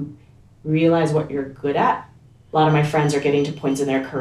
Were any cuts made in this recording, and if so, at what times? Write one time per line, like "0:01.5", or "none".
0:02.4

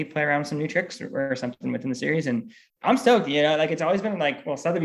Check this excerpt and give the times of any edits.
0:02.6

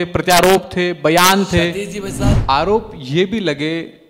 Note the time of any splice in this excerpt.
0:02.3

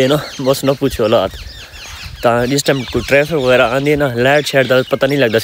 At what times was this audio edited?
none

